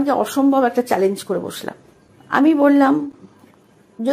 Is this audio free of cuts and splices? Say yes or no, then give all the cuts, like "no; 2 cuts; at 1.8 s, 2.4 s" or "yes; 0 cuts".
no; 1 cut; at 2.4 s